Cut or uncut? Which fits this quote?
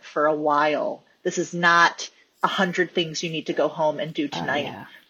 uncut